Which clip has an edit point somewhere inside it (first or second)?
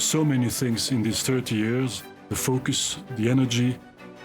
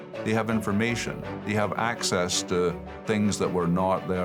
first